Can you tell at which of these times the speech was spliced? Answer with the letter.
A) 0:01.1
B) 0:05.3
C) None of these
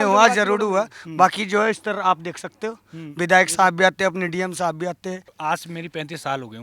B